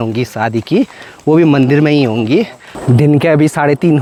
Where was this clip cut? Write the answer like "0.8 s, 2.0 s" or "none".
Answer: none

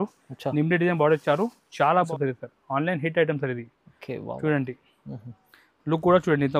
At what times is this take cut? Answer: 2.1 s

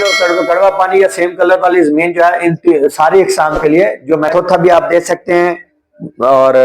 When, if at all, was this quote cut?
4.3 s

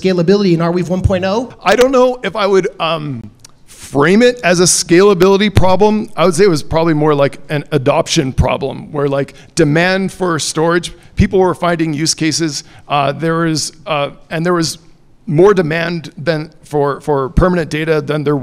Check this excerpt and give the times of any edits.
1.5 s

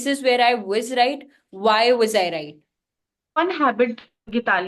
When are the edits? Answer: 3.4 s

